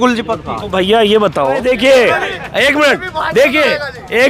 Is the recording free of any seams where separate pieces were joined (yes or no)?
no